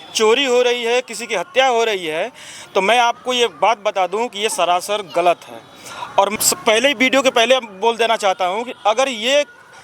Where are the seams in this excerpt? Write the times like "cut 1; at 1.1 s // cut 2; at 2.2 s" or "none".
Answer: cut 1; at 6.3 s